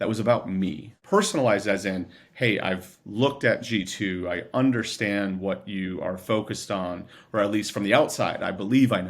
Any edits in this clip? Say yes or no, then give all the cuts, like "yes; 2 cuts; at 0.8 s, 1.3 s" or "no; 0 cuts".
yes; 1 cut; at 0.9 s